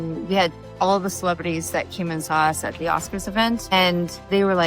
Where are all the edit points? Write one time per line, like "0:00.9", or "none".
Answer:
0:03.7